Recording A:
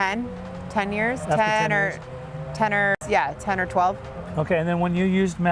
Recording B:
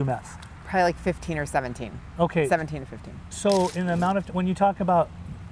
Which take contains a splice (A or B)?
A